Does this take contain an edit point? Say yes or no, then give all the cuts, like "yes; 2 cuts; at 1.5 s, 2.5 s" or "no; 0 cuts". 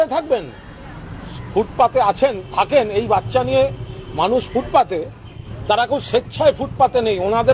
yes; 1 cut; at 1.3 s